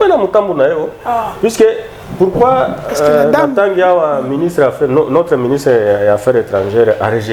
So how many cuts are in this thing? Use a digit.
0